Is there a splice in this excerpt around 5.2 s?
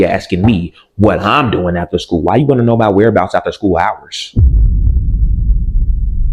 no; 0 cuts

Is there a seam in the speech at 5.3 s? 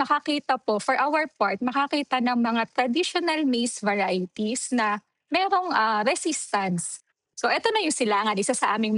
no; 1 cut; at 7.0 s

